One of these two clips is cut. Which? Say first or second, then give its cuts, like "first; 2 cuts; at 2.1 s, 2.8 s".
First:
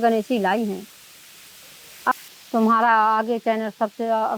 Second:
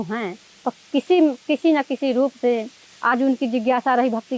first; 1 cut; at 2.1 s